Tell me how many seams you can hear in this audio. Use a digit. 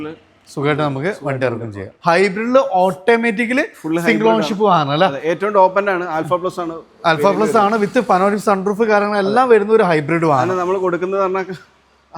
1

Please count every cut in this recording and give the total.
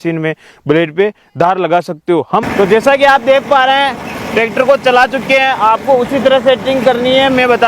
1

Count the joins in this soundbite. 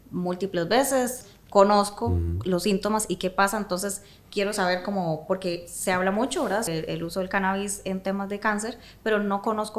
2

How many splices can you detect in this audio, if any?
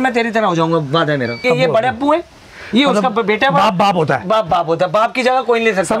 1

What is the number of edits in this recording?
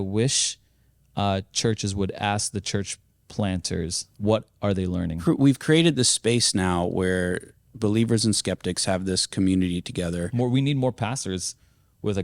3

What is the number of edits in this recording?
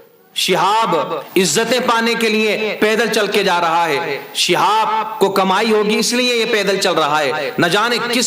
1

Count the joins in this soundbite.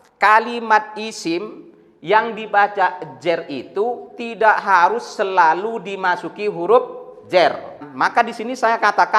1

